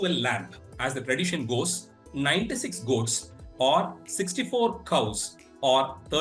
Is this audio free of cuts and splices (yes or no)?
yes